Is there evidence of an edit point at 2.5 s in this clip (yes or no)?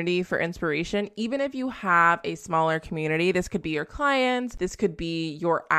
no